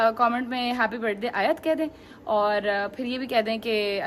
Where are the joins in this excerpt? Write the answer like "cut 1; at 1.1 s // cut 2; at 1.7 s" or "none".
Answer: none